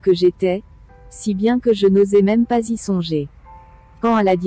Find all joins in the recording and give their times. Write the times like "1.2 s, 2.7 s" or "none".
none